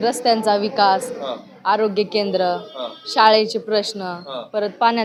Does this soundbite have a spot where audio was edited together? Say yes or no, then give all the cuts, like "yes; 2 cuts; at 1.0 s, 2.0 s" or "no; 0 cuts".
no; 0 cuts